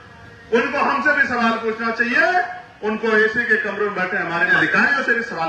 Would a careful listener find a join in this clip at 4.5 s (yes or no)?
yes